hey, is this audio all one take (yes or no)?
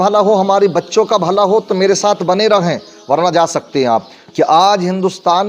no